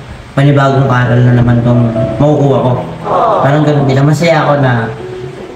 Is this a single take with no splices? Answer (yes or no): yes